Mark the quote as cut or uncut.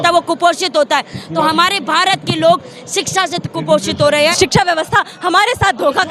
cut